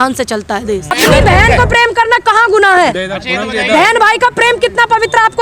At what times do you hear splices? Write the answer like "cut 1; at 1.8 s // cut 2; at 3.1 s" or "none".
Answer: cut 1; at 0.9 s